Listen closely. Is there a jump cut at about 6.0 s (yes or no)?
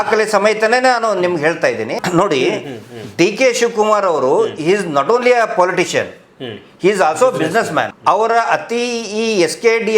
no